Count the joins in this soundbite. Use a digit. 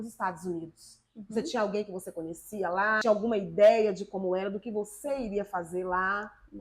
1